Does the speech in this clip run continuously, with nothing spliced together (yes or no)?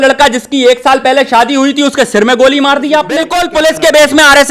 no